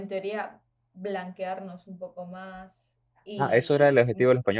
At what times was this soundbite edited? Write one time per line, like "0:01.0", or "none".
0:03.4